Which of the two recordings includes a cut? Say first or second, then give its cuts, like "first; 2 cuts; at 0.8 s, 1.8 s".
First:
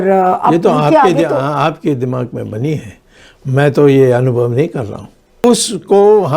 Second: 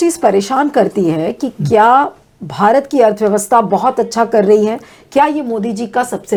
first; 1 cut; at 5.4 s